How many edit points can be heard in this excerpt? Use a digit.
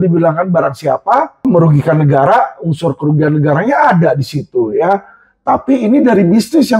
1